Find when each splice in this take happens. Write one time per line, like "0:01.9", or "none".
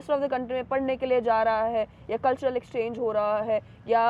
none